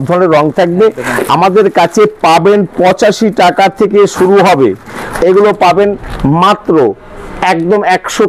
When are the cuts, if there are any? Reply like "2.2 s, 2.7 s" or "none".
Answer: 5.1 s